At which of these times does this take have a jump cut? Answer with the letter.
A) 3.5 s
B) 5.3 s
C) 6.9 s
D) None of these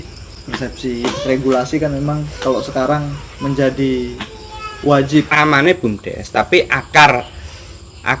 B